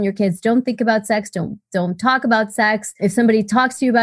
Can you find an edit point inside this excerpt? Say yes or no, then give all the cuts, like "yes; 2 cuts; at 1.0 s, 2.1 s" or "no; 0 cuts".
yes; 1 cut; at 3.0 s